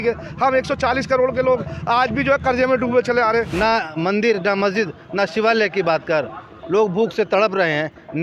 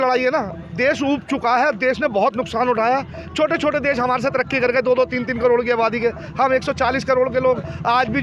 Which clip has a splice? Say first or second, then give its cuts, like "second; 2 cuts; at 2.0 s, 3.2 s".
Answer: first; 1 cut; at 3.5 s